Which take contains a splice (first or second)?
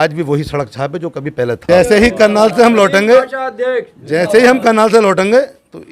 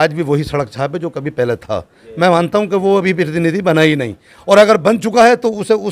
first